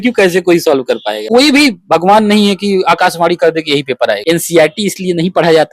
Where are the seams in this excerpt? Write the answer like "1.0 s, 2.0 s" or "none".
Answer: 1.2 s, 4.2 s